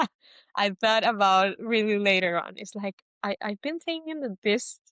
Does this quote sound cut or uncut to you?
uncut